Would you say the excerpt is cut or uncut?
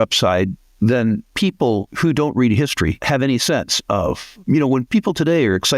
cut